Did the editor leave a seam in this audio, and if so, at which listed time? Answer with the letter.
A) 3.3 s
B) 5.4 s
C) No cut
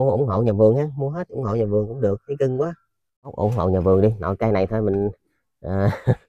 A